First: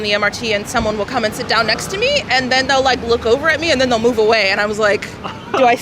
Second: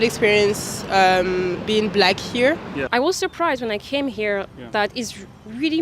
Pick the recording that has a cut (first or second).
second